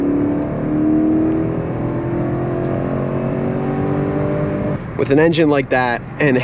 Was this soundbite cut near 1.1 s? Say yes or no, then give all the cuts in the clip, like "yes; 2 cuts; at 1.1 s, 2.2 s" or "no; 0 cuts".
no; 1 cut; at 4.8 s